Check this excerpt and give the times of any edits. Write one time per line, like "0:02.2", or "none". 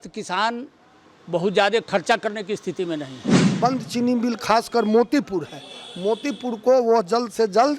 0:03.6